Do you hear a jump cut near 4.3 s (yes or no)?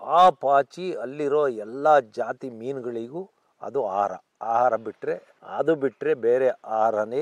no